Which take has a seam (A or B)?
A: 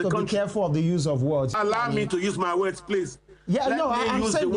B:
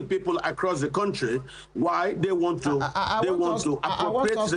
A